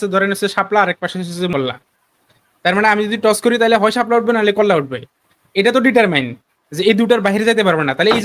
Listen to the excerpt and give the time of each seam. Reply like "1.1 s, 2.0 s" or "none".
1.5 s